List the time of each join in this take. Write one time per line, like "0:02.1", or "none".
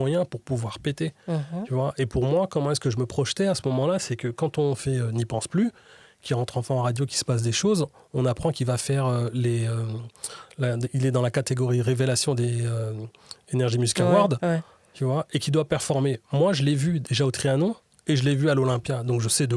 none

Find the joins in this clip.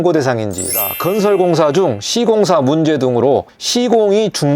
0:00.9

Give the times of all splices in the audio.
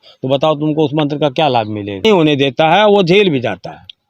0:02.0

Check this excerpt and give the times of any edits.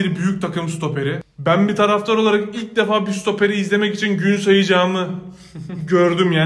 0:01.3

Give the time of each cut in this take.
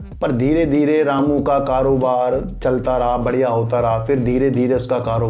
none

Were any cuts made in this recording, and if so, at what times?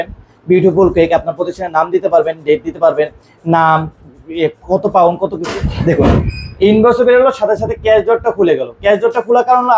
0:05.5

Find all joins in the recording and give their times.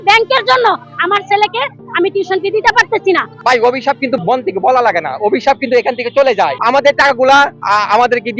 0:03.3
0:04.2
0:06.6
0:07.6

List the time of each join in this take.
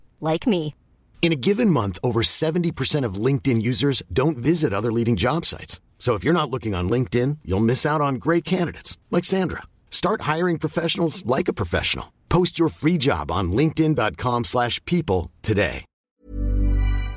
0:16.1

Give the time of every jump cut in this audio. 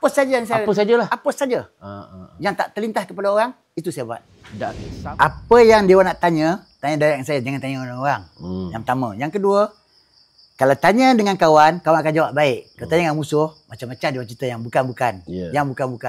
0:04.9

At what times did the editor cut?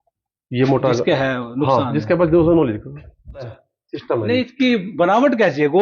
0:03.6

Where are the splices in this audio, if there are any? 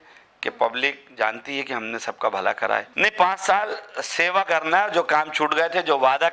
0:02.9

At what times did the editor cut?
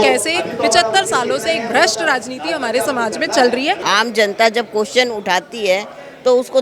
0:03.8

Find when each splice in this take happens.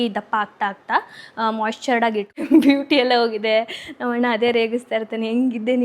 0:02.4

